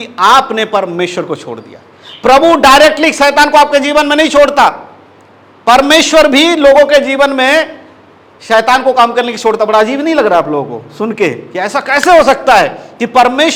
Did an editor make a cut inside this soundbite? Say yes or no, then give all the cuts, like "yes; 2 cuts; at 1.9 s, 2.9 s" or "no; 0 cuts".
no; 0 cuts